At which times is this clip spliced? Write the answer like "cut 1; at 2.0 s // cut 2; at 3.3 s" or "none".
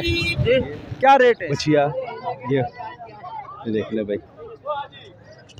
cut 1; at 1.5 s